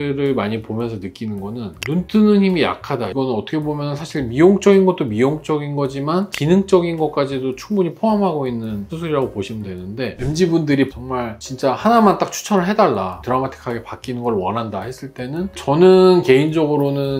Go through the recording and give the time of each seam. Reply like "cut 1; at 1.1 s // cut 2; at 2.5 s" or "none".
cut 1; at 3.1 s // cut 2; at 10.2 s // cut 3; at 13.2 s